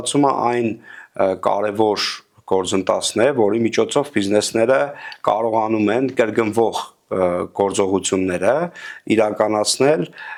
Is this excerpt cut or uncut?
uncut